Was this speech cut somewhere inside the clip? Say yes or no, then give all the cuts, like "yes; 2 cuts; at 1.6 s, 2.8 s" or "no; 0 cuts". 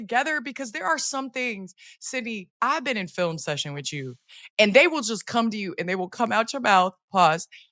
no; 0 cuts